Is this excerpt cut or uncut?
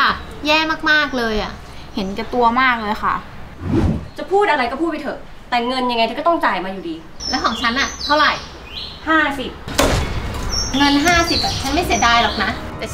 cut